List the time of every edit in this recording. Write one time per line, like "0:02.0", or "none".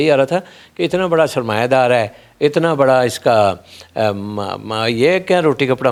none